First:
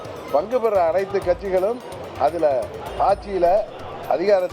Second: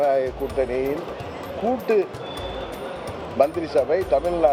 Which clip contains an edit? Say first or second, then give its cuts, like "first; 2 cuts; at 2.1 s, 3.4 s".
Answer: first; 1 cut; at 2.8 s